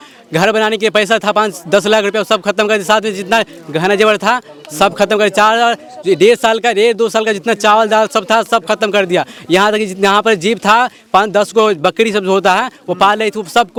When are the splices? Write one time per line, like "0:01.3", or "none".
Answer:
none